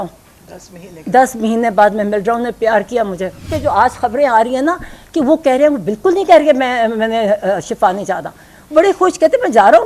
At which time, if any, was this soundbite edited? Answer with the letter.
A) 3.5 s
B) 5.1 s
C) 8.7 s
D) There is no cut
A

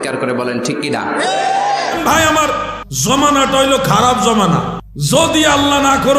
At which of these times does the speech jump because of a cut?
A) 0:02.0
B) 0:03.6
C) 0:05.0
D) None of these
A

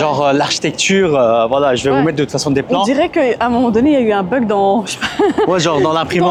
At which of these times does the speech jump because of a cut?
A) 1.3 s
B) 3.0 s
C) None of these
C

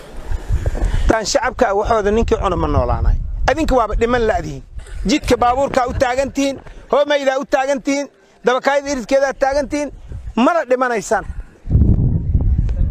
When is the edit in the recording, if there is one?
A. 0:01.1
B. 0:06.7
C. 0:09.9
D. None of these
A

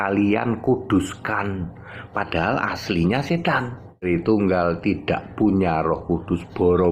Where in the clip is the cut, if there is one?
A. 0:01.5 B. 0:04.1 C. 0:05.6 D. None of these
B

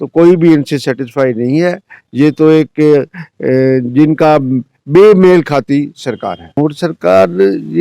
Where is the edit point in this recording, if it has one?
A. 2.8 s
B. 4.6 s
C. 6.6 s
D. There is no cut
C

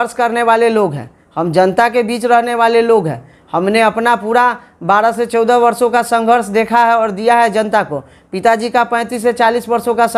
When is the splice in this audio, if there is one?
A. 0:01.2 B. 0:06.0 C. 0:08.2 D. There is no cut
D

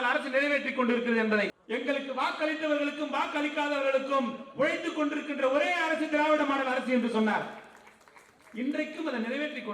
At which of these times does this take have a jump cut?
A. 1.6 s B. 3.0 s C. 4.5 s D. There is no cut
A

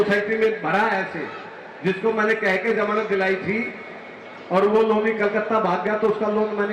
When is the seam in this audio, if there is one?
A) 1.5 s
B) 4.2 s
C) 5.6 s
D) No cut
D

